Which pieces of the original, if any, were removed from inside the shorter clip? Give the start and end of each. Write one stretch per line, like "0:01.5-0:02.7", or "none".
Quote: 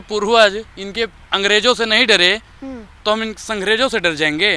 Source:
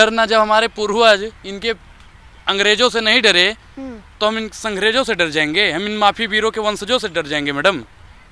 0:01.9-0:02.4